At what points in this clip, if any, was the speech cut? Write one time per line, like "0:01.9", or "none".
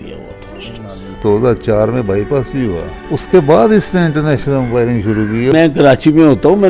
0:01.1
0:02.9
0:05.5